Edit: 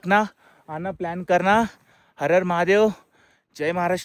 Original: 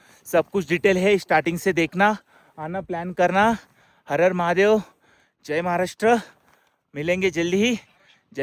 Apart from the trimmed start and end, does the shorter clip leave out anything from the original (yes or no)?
no